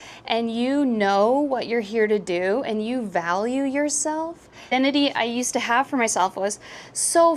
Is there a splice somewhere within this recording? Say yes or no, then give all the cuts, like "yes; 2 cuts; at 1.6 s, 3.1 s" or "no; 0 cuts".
yes; 1 cut; at 4.7 s